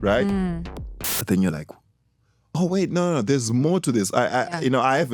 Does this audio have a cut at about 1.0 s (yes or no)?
no